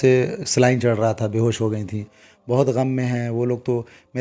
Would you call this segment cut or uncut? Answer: uncut